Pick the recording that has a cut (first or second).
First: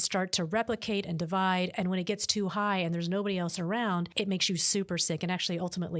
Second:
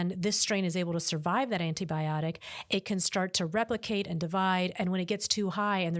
first